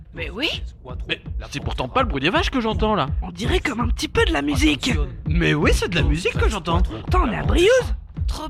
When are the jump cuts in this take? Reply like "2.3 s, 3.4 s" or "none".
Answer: none

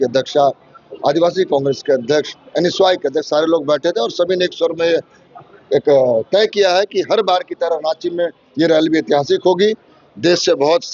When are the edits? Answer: none

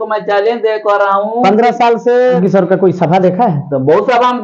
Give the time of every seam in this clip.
2.4 s

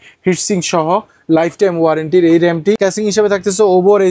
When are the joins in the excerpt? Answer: 2.8 s

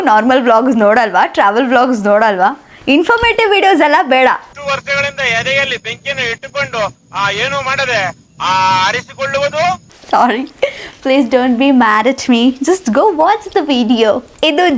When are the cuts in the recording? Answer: none

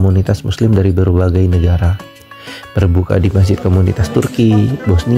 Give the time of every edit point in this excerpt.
none

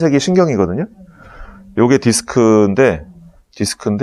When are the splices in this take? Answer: none

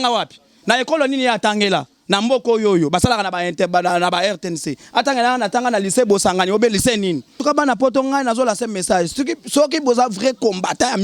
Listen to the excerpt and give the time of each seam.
7.4 s

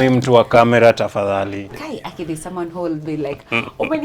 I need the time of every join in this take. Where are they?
1.6 s

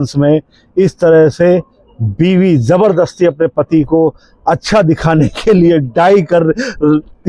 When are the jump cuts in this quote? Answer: none

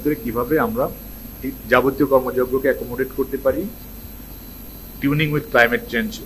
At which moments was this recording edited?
none

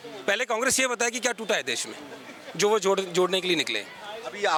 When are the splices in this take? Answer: none

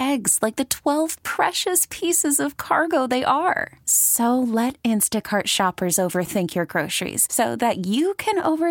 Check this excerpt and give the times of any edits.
none

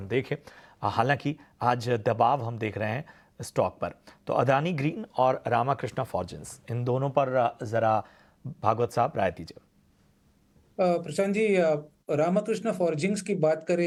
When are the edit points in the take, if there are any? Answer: none

